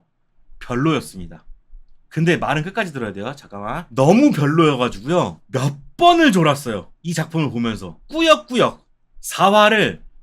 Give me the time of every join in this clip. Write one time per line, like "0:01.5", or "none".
0:03.8
0:06.9
0:07.9

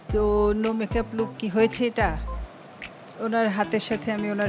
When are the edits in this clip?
none

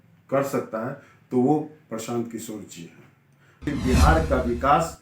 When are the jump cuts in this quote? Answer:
0:03.6

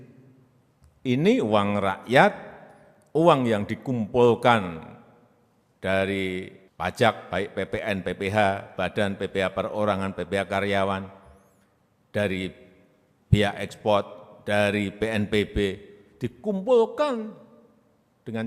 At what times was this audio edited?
0:06.6

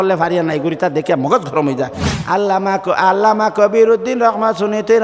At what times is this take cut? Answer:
0:02.1

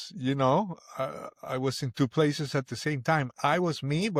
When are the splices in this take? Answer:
none

